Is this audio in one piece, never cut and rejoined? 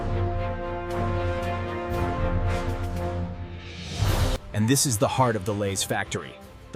no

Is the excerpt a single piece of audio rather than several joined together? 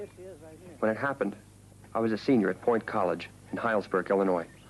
no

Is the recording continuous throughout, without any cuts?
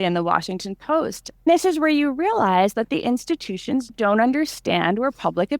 no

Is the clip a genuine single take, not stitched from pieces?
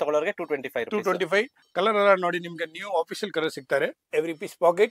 no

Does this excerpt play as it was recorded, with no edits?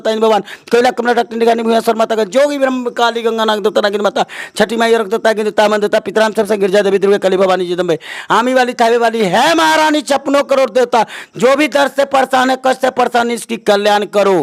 yes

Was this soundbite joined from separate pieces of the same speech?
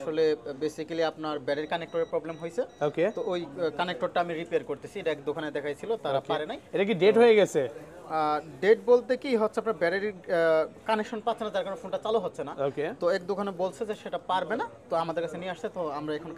no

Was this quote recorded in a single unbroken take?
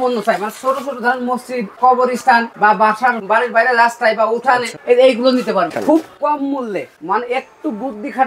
no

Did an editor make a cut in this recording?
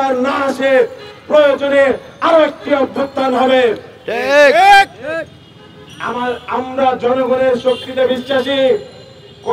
no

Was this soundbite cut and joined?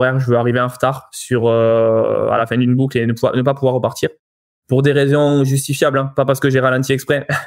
no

